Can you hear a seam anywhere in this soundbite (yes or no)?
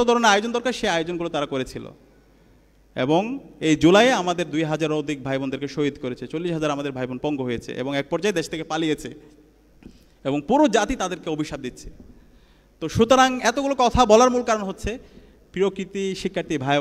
no